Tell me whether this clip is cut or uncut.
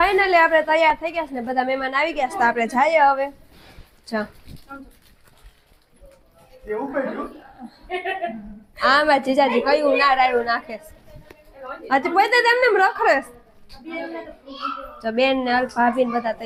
uncut